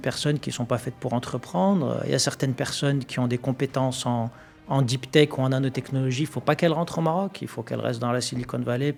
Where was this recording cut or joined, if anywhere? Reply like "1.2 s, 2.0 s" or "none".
none